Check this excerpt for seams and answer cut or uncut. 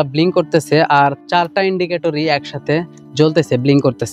uncut